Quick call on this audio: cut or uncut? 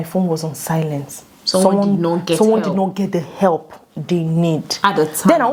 uncut